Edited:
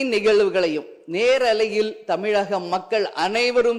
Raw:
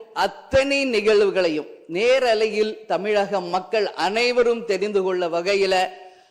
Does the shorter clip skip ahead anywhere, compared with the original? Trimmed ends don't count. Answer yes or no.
no